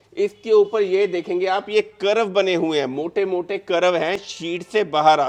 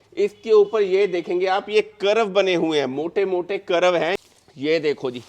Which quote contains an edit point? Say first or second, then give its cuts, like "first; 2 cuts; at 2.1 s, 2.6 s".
second; 1 cut; at 4.3 s